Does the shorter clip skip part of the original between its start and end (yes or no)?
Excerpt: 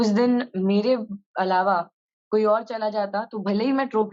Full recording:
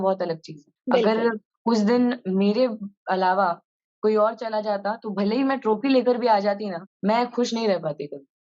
no